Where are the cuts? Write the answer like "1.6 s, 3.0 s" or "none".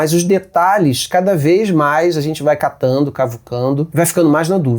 3.9 s